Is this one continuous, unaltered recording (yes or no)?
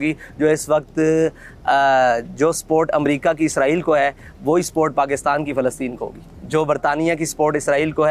yes